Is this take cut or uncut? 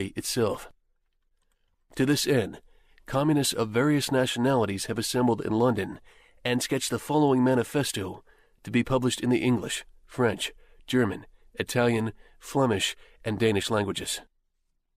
uncut